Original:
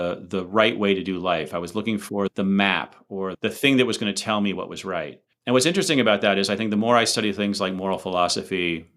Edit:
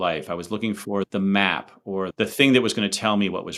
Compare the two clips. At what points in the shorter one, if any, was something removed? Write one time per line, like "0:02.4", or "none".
none